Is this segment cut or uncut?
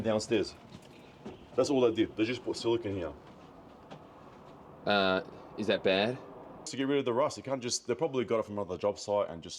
cut